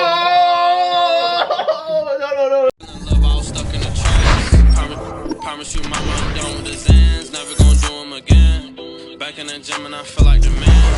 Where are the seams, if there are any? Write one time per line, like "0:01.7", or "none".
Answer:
0:02.7